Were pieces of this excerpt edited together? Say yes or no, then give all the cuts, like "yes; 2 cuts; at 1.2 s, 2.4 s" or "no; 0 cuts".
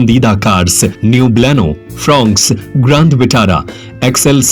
yes; 1 cut; at 1.0 s